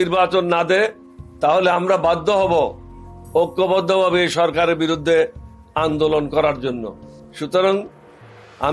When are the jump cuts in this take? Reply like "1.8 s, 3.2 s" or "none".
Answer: none